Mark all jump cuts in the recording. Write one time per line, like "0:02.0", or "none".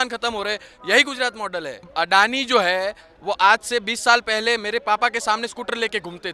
0:01.8